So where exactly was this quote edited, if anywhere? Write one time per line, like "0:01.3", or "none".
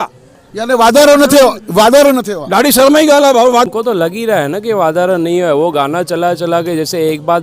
0:03.7

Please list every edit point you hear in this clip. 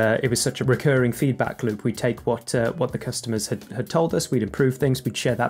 none

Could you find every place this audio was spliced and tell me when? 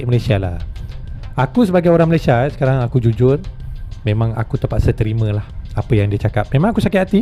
none

